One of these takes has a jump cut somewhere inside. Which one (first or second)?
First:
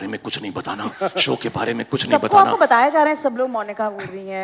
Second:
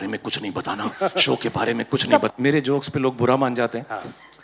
second